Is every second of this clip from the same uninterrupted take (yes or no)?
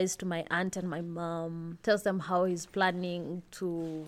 no